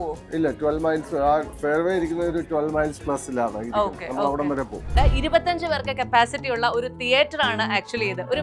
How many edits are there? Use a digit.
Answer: 1